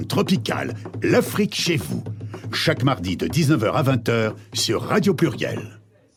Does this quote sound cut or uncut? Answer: uncut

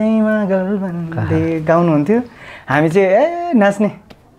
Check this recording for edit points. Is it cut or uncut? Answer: uncut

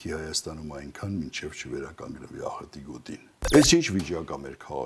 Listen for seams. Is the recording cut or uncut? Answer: cut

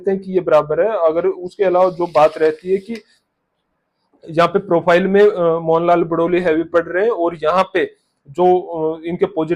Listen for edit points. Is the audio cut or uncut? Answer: uncut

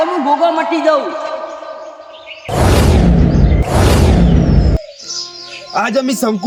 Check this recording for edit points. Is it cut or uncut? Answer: uncut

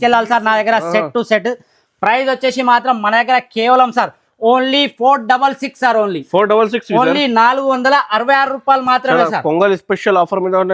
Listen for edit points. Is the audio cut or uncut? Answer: uncut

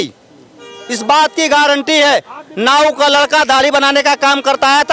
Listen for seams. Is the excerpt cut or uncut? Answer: uncut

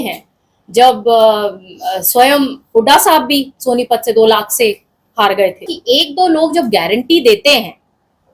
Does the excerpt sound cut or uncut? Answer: cut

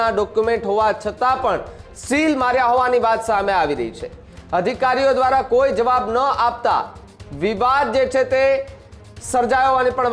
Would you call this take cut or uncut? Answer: uncut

